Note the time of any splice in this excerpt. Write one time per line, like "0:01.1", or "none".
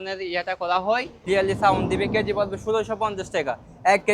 0:01.1